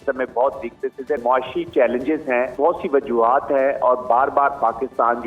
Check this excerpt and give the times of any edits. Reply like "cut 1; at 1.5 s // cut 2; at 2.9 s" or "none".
cut 1; at 1.2 s // cut 2; at 2.5 s